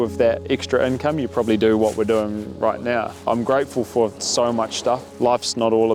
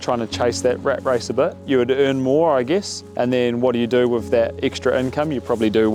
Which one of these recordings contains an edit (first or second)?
first